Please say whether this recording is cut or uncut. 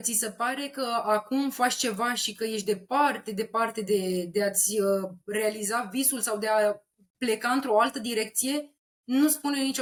uncut